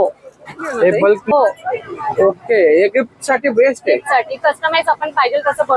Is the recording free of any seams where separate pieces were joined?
no; 1 cut; at 1.2 s

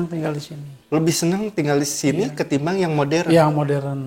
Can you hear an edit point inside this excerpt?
no; 0 cuts

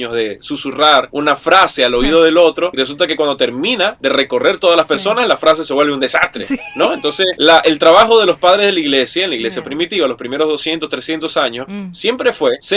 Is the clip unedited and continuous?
yes; 0 cuts

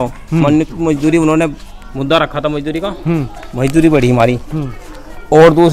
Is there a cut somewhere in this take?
no; 0 cuts

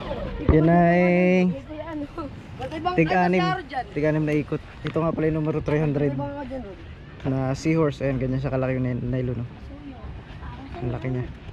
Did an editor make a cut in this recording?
no; 0 cuts

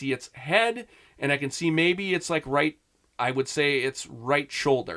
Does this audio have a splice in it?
no; 0 cuts

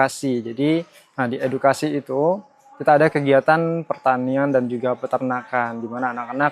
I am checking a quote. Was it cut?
no; 0 cuts

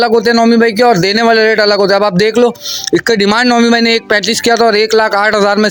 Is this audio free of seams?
yes; 0 cuts

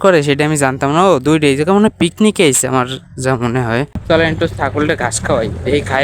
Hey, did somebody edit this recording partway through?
yes; 1 cut; at 4.0 s

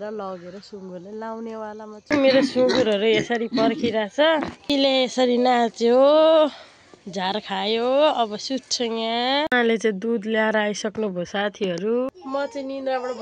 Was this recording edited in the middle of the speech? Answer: yes; 4 cuts; at 2.1 s, 4.6 s, 9.5 s, 12.1 s

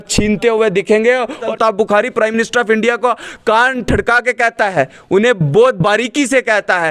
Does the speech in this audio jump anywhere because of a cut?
yes; 1 cut; at 1.4 s

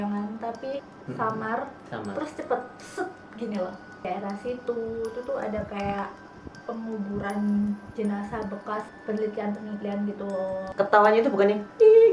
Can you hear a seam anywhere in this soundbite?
yes; 4 cuts; at 0.9 s, 4.0 s, 8.9 s, 10.6 s

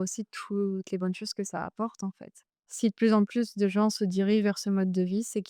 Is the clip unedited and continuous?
no; 1 cut; at 2.6 s

